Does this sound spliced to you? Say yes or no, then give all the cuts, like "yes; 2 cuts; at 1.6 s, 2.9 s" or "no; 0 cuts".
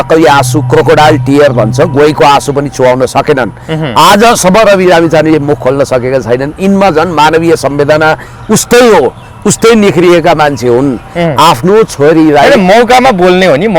no; 0 cuts